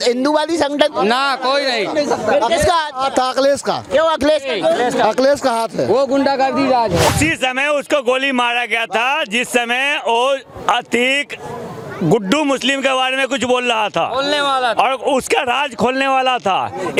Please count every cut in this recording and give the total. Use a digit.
0